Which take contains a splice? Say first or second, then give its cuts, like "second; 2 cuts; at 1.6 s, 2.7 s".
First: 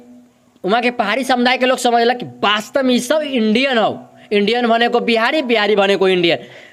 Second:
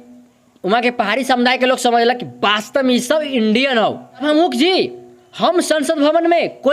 second; 1 cut; at 4.2 s